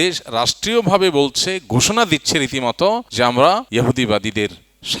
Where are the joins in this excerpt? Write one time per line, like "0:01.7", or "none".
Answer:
0:03.1
0:03.7